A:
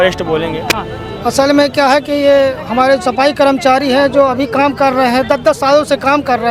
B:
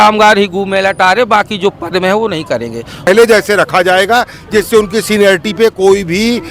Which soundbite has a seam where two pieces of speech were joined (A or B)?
B